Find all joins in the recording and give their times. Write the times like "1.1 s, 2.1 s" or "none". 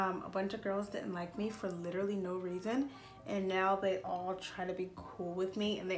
none

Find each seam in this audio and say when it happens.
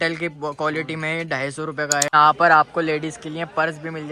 2.1 s

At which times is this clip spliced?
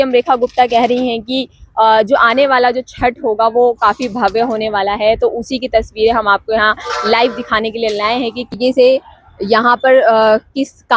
8.5 s

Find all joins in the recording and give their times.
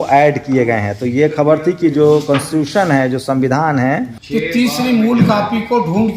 4.2 s

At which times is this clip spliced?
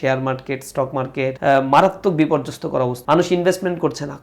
1.4 s, 3.0 s

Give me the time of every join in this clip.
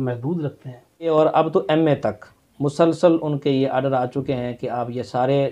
1.1 s

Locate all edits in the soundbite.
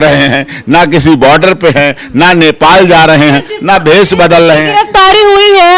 none

